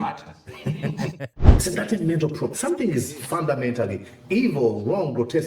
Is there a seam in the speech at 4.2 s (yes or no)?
no